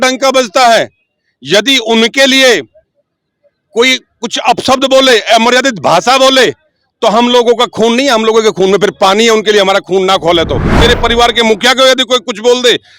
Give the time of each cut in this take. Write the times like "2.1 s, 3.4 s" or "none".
10.7 s